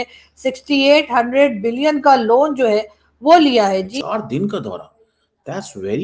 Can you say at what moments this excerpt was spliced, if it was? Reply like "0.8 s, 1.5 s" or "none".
3.9 s